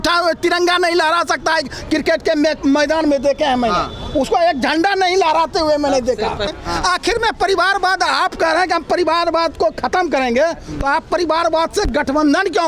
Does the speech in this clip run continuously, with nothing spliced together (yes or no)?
no